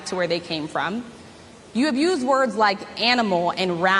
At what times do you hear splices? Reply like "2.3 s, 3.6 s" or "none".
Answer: 1.2 s